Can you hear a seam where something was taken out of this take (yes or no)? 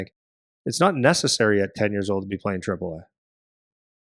no